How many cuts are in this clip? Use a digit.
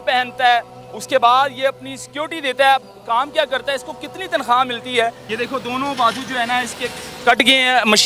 1